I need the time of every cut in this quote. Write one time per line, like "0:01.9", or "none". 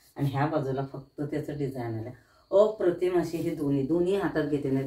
none

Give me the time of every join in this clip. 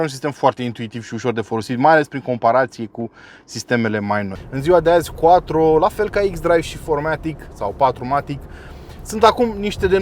0:04.3

